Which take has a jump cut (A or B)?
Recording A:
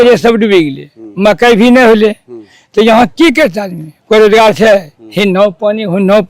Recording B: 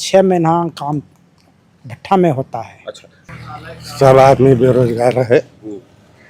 B